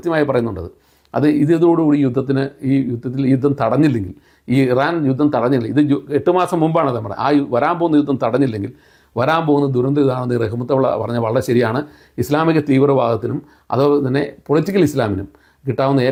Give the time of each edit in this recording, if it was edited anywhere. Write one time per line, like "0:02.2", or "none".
none